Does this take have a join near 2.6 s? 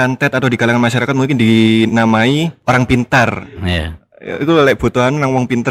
yes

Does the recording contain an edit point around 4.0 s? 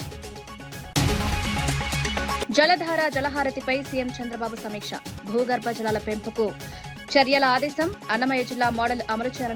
no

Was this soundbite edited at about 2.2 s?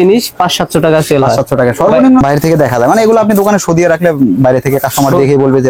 yes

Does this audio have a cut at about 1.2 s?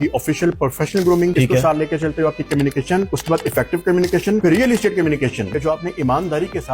no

